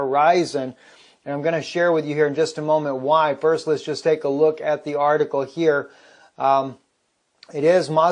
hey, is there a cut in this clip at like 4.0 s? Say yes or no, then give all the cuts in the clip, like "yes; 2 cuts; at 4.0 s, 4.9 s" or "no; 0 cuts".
no; 0 cuts